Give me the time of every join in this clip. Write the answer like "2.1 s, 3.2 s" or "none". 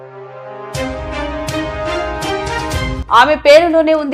3.0 s